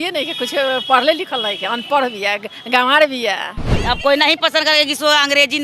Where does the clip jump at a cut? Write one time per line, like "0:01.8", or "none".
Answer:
0:03.6